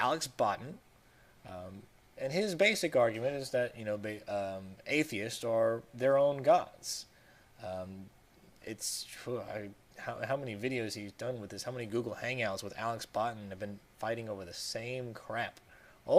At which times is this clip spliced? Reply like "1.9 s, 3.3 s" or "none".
6.2 s